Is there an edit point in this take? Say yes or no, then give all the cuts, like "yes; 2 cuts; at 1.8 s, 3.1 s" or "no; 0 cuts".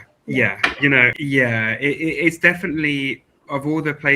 yes; 1 cut; at 1.1 s